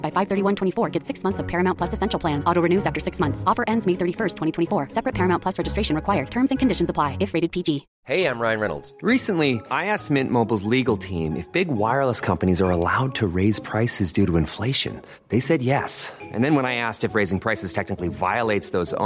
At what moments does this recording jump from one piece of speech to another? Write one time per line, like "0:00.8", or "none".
0:07.9